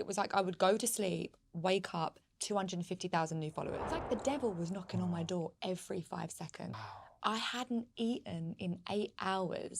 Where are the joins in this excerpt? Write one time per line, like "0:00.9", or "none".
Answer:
0:03.9
0:06.7